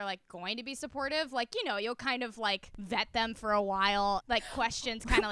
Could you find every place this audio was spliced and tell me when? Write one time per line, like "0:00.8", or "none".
0:02.7
0:04.2

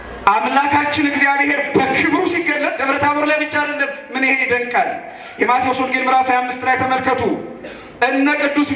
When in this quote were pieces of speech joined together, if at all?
none

